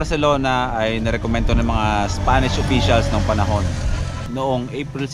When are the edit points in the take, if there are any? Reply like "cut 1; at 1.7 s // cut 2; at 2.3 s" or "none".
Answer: none